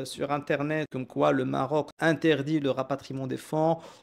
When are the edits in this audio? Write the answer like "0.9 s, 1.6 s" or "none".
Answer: 0.9 s, 1.9 s